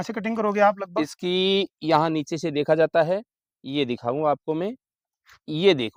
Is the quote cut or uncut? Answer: uncut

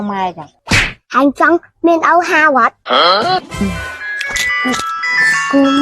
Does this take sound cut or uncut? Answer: cut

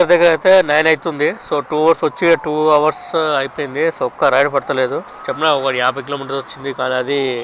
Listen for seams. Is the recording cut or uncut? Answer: uncut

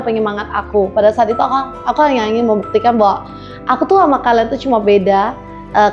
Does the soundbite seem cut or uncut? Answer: uncut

